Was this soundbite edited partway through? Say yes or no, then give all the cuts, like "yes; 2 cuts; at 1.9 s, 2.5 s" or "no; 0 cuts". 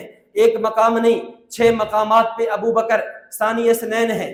no; 0 cuts